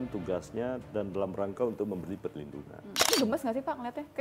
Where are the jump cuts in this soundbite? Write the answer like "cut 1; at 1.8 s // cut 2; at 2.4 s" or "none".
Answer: cut 1; at 3.0 s